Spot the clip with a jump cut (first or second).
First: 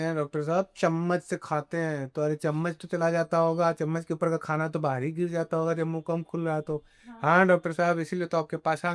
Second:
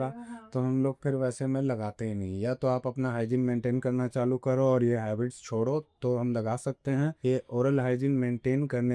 second